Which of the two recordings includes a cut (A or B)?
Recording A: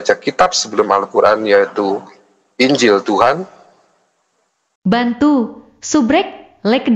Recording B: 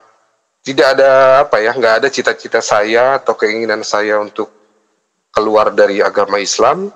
A